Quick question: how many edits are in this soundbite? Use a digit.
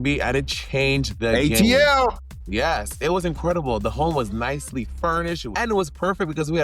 1